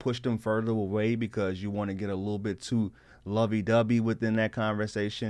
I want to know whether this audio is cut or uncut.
uncut